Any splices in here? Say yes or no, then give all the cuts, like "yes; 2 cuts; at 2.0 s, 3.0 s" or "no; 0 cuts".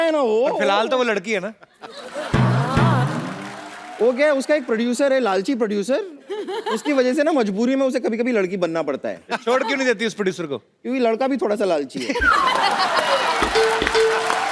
no; 0 cuts